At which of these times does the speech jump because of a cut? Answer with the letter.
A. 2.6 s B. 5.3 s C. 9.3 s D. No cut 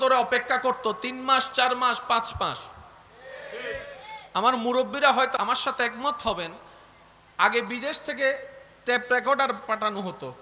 B